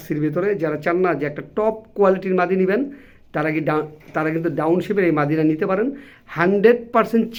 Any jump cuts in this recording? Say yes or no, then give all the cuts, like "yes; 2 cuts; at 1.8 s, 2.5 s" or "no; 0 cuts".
no; 0 cuts